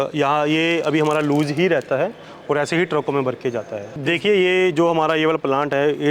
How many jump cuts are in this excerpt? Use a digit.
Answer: 1